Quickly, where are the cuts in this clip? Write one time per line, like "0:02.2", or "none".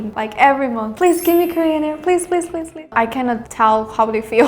0:02.8